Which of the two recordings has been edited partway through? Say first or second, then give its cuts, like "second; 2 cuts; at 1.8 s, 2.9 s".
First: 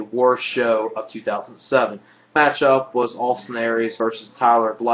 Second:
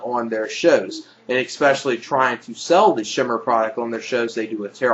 first; 1 cut; at 3.8 s